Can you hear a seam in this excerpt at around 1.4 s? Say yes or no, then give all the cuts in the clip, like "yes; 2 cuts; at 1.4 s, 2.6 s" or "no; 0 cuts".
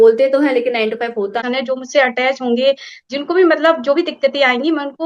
yes; 1 cut; at 1.4 s